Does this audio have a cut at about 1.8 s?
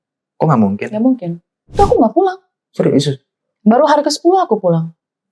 yes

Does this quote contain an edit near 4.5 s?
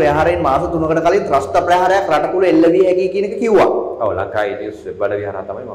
no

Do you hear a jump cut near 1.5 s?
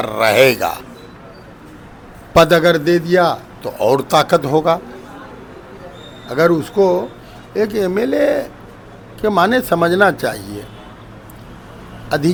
no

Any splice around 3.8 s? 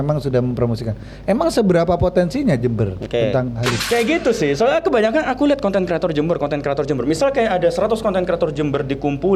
yes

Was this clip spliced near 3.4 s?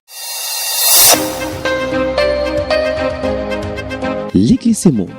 yes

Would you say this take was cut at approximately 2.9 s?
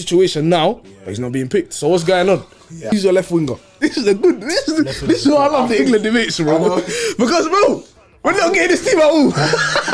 yes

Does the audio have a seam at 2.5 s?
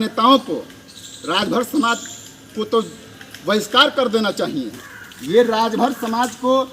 no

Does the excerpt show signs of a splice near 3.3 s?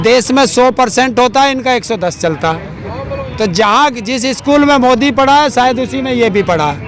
yes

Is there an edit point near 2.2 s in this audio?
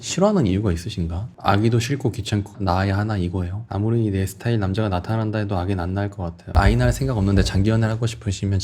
no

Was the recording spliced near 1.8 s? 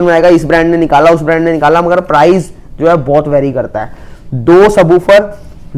no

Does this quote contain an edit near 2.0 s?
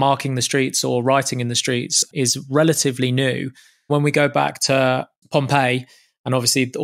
yes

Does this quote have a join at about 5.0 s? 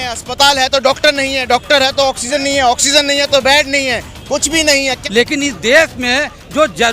yes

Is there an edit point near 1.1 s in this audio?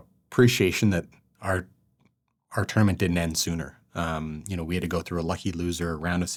no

